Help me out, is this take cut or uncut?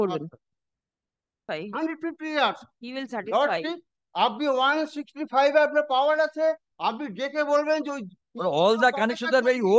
cut